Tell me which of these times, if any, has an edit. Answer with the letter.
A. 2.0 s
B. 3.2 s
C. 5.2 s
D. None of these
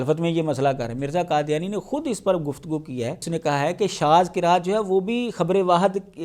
B